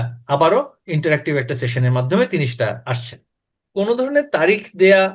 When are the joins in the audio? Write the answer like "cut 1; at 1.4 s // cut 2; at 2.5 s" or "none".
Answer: cut 1; at 3.6 s